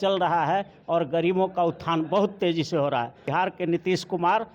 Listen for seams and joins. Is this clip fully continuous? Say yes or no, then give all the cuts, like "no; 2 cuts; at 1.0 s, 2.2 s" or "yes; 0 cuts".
no; 1 cut; at 3.2 s